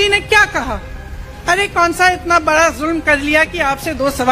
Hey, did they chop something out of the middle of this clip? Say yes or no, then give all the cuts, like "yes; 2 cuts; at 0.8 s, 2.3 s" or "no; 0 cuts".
no; 0 cuts